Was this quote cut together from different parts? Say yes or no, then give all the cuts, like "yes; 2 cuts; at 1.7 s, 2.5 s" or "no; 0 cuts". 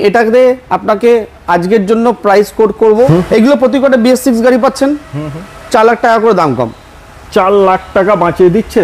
yes; 1 cut; at 3.1 s